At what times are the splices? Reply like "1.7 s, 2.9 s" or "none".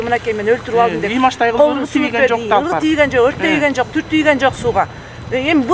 none

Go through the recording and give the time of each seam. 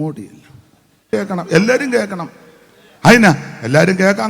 1.0 s

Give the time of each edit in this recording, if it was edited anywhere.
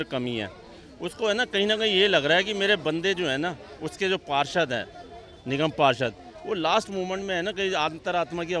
none

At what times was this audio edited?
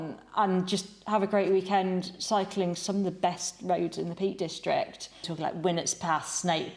5.3 s

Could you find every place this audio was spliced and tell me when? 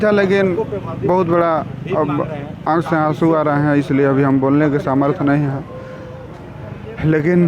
none

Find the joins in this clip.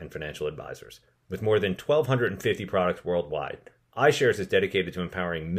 none

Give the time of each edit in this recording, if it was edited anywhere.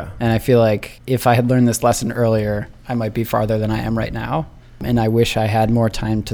0.9 s, 4.8 s

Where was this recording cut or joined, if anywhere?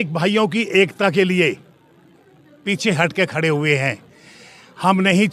none

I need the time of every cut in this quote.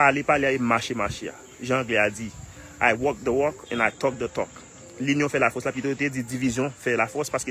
4.9 s

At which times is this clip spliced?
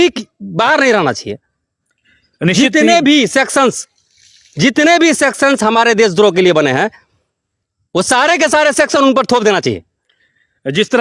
none

